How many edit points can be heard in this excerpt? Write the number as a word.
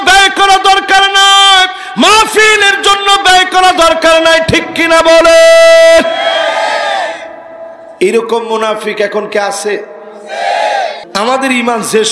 one